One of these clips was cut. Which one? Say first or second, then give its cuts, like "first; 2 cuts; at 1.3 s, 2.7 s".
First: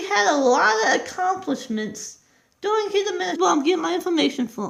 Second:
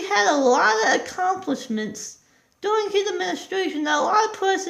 second; 1 cut; at 3.4 s